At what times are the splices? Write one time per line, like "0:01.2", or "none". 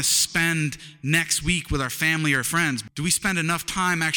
0:02.9

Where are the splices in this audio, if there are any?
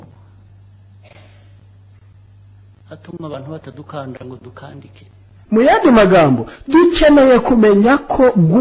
0:05.4

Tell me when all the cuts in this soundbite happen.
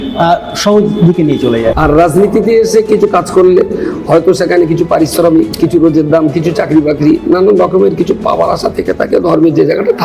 0:01.8
0:05.5

